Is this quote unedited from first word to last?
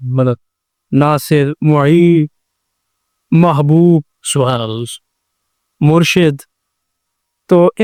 yes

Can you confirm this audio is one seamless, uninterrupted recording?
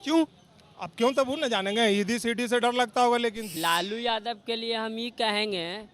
no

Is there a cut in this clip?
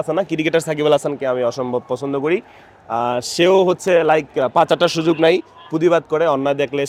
no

